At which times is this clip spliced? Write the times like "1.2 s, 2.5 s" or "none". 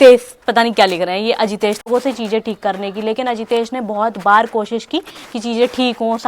1.8 s